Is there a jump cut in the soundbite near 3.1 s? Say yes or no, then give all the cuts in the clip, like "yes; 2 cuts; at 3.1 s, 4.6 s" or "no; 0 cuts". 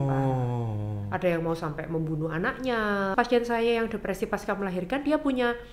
yes; 1 cut; at 3.1 s